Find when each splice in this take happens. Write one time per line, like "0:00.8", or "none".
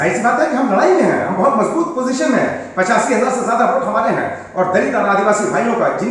none